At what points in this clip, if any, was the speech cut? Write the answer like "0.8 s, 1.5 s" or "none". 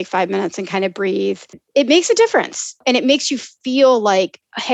1.6 s, 2.8 s